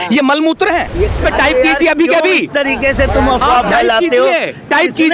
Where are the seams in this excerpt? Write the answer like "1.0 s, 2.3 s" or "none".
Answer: 1.2 s